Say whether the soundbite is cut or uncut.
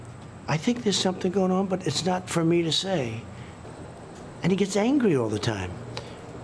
cut